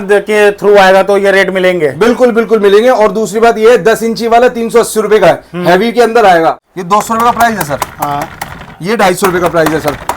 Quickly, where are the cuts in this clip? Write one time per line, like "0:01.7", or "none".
0:06.9